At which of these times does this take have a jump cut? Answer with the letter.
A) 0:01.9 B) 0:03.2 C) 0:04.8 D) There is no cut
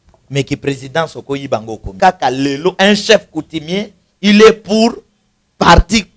A